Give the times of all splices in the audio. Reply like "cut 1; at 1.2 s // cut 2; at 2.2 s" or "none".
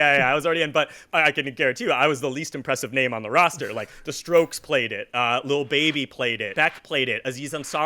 cut 1; at 1.0 s // cut 2; at 6.5 s